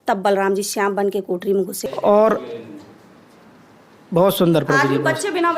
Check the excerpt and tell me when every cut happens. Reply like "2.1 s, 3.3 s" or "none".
1.8 s